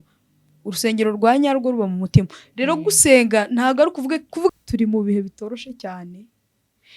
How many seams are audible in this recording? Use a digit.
1